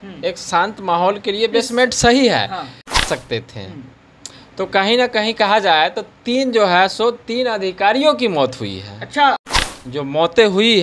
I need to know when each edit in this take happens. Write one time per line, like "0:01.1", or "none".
0:03.0
0:09.7